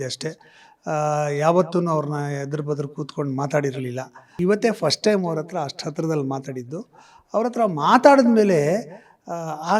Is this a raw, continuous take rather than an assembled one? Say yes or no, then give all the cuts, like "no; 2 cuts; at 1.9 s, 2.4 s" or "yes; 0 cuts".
no; 1 cut; at 4.3 s